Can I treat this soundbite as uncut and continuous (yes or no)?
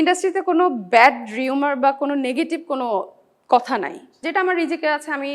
no